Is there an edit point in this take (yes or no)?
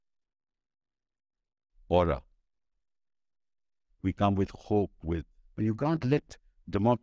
yes